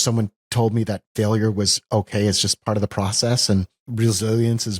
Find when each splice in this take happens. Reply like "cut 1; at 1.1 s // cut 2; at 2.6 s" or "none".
cut 1; at 3.8 s